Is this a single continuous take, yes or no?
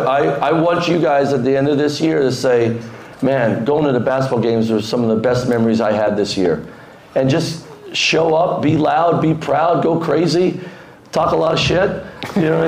yes